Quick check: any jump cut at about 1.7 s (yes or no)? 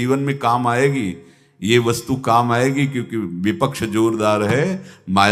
no